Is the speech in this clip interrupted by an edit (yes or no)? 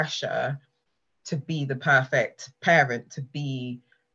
no